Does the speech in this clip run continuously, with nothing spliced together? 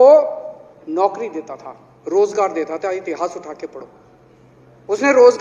yes; 0 cuts

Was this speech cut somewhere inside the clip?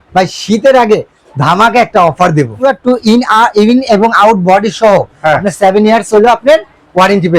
yes; 1 cut; at 2.5 s

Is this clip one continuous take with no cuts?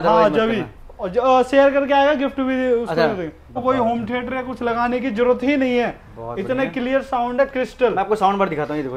no; 1 cut; at 3.5 s

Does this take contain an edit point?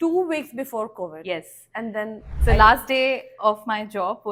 no; 0 cuts

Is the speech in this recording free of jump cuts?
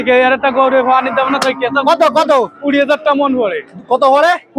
yes; 0 cuts

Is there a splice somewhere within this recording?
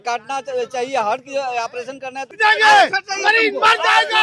yes; 1 cut; at 2.3 s

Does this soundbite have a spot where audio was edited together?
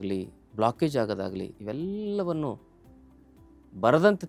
no; 0 cuts

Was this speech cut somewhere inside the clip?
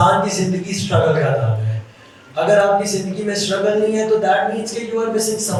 no; 0 cuts

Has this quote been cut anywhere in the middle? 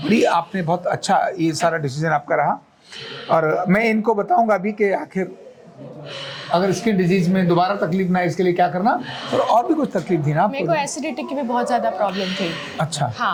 no; 0 cuts

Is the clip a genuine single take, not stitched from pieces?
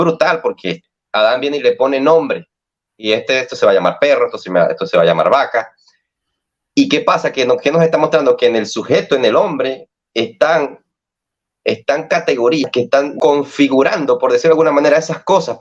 no; 2 cuts; at 0.9 s, 12.6 s

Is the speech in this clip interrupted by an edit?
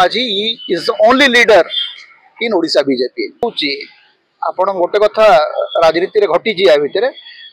yes; 1 cut; at 3.5 s

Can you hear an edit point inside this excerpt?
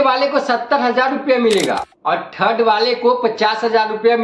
yes; 1 cut; at 1.9 s

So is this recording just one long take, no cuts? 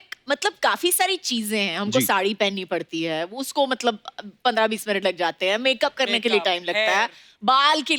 yes; 0 cuts

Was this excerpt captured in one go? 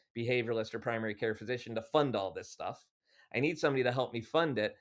yes; 0 cuts

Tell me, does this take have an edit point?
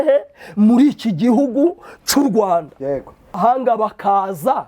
yes; 1 cut; at 3.4 s

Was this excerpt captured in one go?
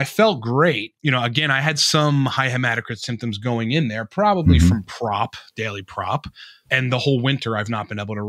no; 2 cuts; at 0.9 s, 6.6 s

